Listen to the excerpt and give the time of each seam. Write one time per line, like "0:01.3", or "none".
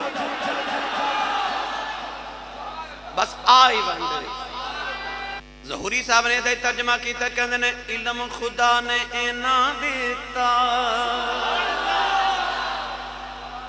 0:05.4